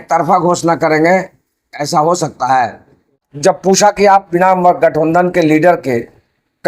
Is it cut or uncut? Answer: cut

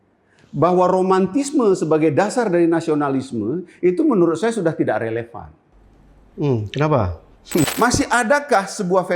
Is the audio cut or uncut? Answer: cut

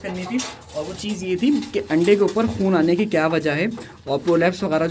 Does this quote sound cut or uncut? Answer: uncut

